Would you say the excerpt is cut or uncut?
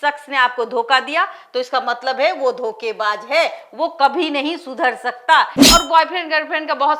cut